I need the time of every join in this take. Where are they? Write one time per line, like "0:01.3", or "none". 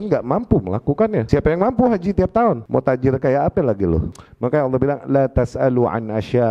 0:01.2
0:02.6
0:04.2